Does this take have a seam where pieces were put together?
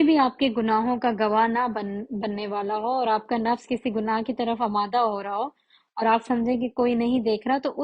no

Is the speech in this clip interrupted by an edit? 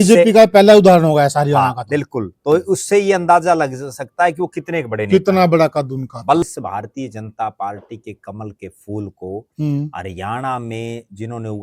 yes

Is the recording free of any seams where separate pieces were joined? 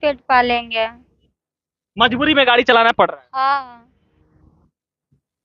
yes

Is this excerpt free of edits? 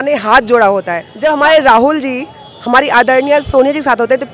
no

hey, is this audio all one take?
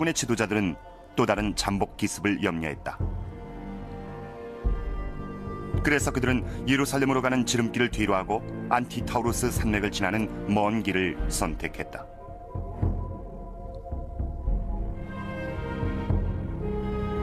yes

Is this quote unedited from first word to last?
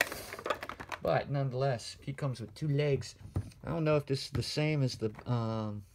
yes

